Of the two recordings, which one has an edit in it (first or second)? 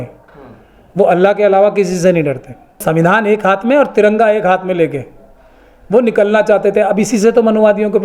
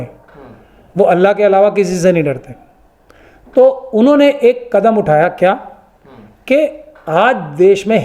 first